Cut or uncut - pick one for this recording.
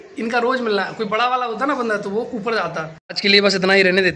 cut